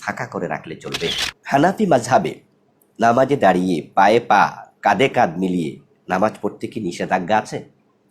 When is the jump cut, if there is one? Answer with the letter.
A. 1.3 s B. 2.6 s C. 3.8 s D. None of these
A